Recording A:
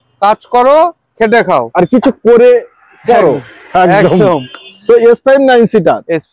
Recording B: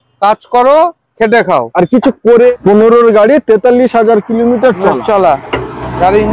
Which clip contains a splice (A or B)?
B